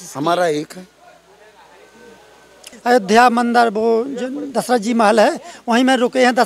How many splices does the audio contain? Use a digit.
1